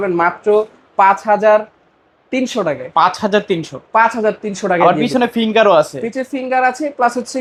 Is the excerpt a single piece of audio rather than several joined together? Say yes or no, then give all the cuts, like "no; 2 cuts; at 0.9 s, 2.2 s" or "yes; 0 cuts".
yes; 0 cuts